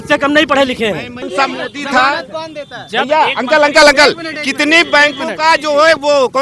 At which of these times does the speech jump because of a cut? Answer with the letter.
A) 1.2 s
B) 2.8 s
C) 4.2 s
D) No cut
A